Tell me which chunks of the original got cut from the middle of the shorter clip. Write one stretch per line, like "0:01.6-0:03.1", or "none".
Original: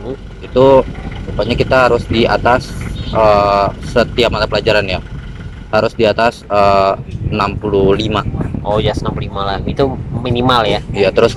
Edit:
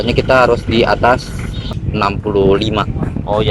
0:03.1-0:07.0